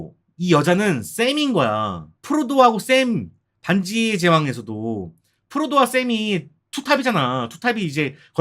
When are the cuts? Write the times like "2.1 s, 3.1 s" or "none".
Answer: none